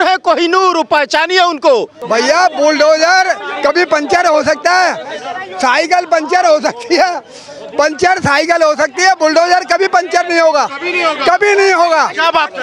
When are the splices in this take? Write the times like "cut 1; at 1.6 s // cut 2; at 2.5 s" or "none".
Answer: cut 1; at 2.0 s